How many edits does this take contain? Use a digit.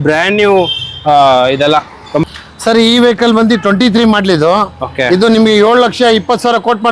1